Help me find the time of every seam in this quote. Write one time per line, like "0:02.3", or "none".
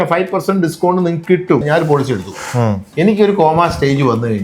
0:01.6